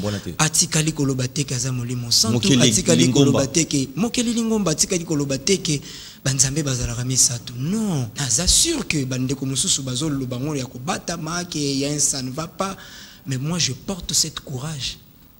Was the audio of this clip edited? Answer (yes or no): yes